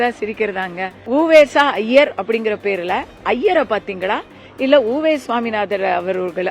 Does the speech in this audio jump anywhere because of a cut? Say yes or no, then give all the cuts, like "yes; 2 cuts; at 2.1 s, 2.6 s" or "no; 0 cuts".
yes; 1 cut; at 0.9 s